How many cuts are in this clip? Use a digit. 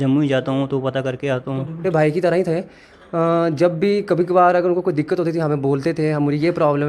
1